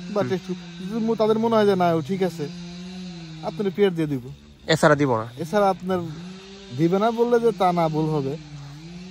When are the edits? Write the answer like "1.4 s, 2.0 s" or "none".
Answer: none